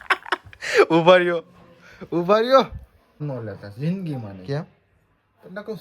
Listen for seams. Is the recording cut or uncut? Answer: cut